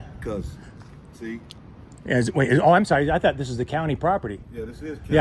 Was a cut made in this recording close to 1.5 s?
no; 0 cuts

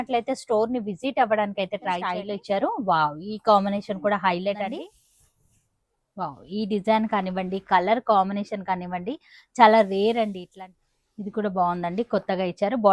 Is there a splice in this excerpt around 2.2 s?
yes; 3 cuts; at 2.2 s, 4.8 s, 10.4 s

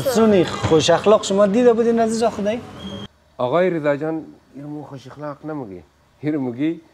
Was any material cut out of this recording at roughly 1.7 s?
no; 1 cut; at 2.9 s

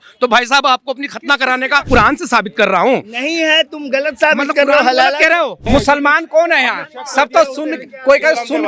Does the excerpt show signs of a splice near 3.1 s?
no; 2 cuts; at 1.9 s, 5.6 s

